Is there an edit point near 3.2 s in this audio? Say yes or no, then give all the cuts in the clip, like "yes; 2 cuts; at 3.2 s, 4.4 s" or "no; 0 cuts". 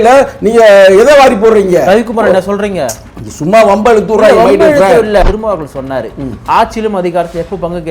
no; 1 cut; at 5.2 s